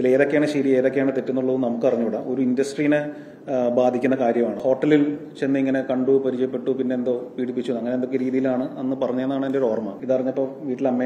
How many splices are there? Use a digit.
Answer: 2